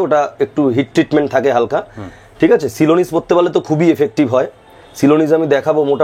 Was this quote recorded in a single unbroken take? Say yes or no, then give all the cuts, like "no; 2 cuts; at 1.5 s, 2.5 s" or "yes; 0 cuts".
yes; 0 cuts